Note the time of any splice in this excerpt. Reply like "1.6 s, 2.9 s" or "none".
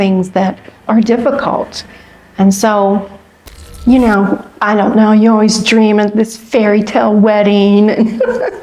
3.7 s